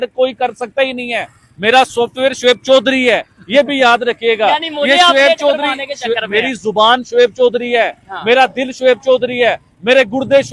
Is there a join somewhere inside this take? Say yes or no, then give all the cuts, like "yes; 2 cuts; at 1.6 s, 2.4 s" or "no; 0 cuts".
no; 0 cuts